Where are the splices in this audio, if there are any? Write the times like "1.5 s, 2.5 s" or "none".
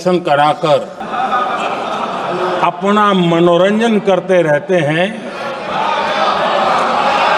1.0 s